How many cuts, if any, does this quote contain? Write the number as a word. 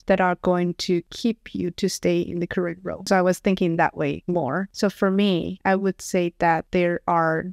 one